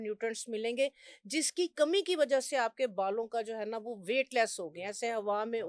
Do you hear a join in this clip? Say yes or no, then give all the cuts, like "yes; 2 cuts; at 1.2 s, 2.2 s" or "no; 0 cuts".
no; 0 cuts